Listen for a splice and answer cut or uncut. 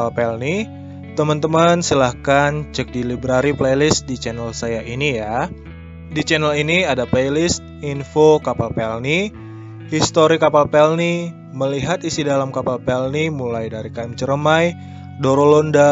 uncut